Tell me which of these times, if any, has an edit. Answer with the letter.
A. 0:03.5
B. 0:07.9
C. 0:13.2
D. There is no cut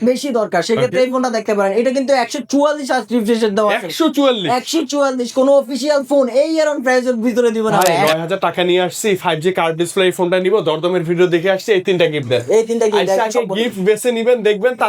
B